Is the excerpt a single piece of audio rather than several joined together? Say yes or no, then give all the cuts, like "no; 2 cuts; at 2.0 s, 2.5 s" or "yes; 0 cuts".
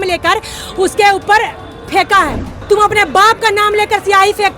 no; 1 cut; at 2.4 s